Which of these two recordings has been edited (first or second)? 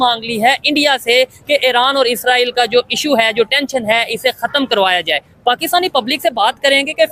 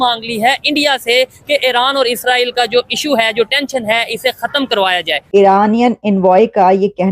second